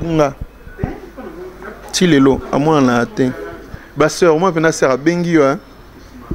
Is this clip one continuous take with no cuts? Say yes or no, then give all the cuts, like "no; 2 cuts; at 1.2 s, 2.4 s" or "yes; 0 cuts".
no; 1 cut; at 3.8 s